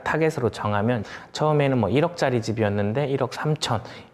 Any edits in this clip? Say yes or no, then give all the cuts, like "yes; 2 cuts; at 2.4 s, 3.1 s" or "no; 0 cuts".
yes; 1 cut; at 1.1 s